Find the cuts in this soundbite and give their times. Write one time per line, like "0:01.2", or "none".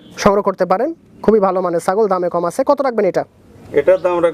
none